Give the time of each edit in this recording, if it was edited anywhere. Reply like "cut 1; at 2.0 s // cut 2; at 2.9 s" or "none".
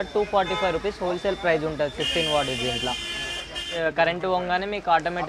cut 1; at 3.7 s